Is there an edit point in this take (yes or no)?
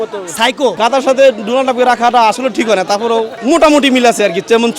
yes